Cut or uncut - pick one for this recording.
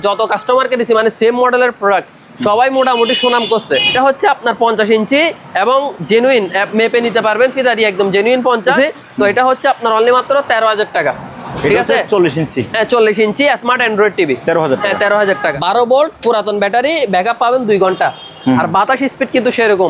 cut